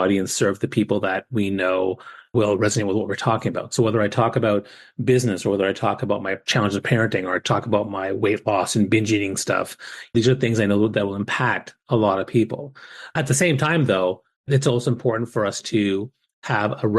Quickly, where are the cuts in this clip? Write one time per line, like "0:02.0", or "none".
0:02.3
0:06.4
0:10.1
0:13.1
0:14.5